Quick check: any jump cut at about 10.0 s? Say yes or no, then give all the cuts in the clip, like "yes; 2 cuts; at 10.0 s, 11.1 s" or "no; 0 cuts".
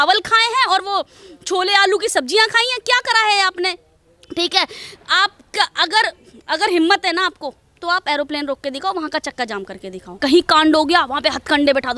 yes; 1 cut; at 10.0 s